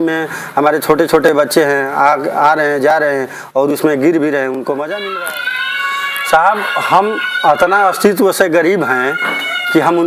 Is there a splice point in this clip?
yes; 1 cut; at 5.1 s

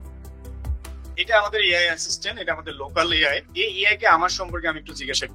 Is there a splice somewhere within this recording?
yes; 2 cuts; at 1.1 s, 3.5 s

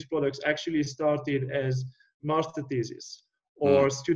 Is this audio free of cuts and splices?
yes; 0 cuts

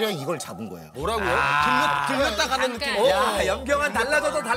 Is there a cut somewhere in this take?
no; 0 cuts

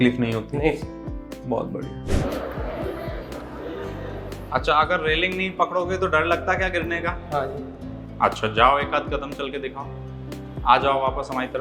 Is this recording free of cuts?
no; 1 cut; at 2.0 s

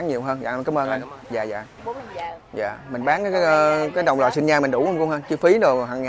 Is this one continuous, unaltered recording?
no; 1 cut; at 1.8 s

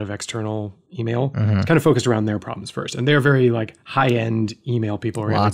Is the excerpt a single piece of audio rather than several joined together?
no; 1 cut; at 1.1 s

